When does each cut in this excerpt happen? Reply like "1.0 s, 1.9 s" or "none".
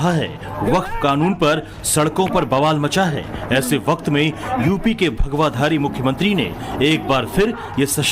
0.9 s